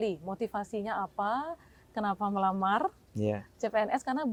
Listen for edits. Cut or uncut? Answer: uncut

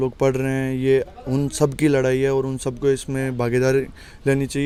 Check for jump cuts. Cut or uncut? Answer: uncut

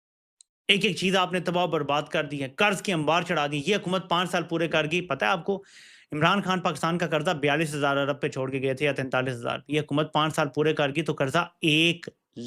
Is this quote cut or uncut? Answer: uncut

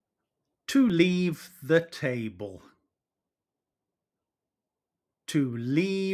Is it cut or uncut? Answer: uncut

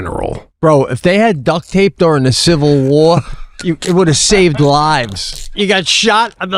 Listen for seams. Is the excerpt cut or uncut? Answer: cut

